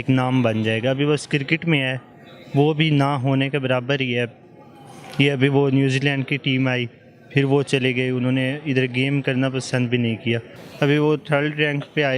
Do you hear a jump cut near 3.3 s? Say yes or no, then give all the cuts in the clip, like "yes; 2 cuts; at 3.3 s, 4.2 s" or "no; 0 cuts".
no; 1 cut; at 10.6 s